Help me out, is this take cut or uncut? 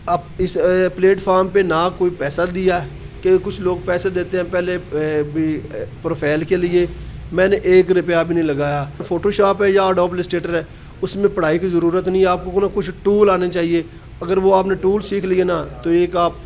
cut